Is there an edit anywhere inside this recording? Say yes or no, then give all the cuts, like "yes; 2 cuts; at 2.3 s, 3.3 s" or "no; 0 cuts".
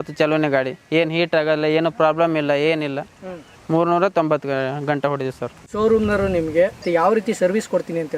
no; 0 cuts